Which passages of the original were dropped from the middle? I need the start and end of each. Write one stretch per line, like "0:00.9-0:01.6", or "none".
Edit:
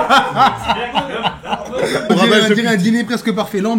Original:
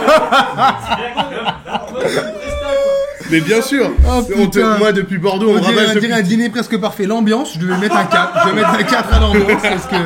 0:02.3-0:05.5

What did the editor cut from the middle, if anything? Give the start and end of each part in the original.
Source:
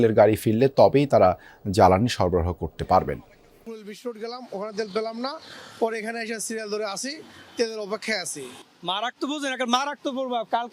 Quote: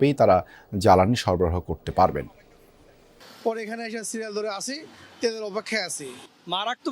0:04.0-0:05.4

